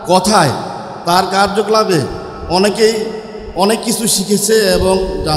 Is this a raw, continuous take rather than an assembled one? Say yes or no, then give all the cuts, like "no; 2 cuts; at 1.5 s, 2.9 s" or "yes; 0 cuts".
yes; 0 cuts